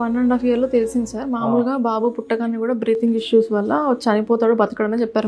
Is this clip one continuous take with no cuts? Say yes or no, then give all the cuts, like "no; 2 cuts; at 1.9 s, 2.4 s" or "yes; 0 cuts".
yes; 0 cuts